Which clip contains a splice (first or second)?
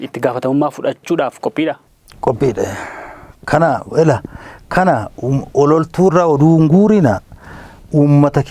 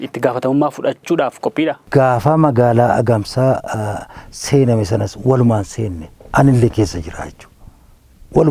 second